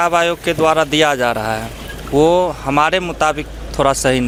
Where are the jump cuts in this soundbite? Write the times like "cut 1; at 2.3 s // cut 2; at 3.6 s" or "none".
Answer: none